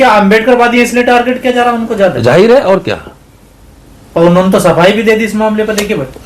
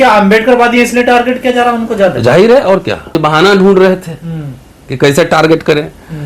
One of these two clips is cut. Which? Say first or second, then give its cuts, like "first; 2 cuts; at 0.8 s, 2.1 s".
second; 1 cut; at 3.2 s